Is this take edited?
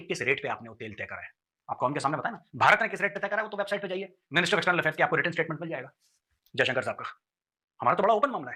no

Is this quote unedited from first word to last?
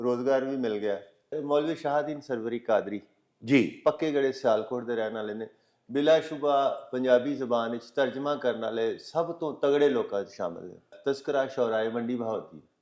no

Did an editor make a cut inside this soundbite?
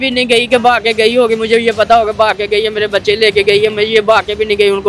no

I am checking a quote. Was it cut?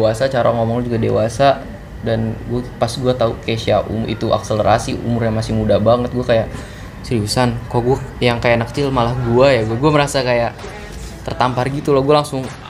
no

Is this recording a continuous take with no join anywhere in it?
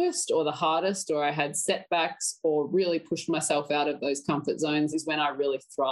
no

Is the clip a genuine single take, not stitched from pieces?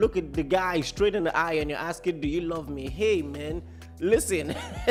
yes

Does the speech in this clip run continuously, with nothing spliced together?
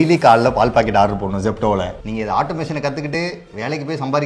no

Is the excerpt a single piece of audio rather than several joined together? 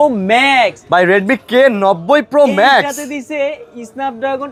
yes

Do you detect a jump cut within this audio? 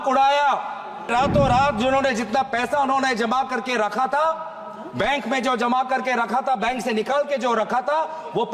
yes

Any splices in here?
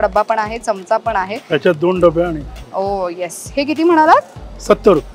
no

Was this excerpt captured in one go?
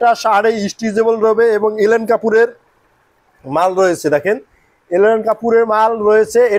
yes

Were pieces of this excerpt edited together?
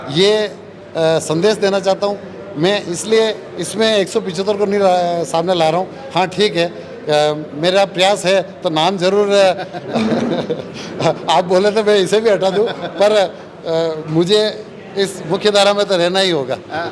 no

